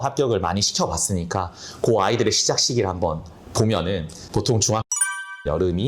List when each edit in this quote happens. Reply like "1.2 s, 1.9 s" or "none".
4.2 s

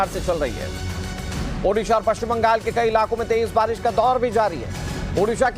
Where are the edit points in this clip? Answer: 2.0 s

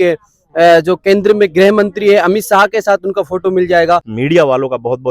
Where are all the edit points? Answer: 4.1 s

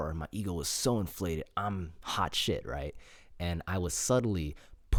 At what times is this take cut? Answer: none

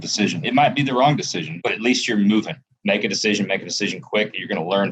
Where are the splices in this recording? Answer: 1.5 s, 2.7 s

